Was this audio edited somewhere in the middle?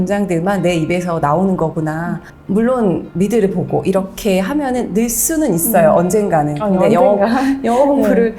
yes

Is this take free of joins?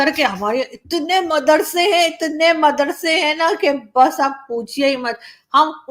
yes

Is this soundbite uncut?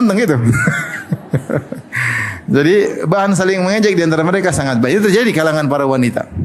yes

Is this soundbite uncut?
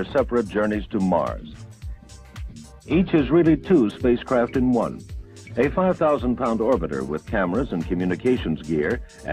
no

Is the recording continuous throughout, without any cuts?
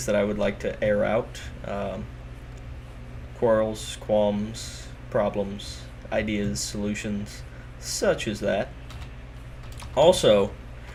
yes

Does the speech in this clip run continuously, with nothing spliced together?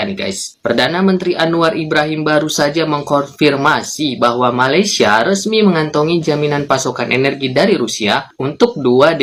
yes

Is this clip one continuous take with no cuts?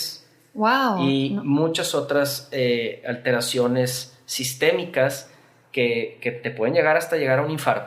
yes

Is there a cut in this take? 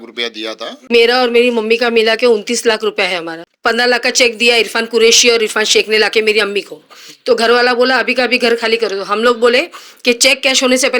yes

